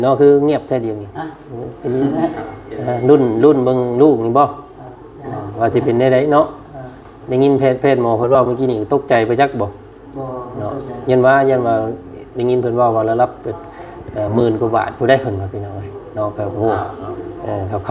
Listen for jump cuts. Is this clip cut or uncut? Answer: uncut